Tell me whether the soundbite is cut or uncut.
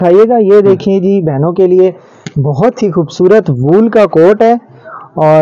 uncut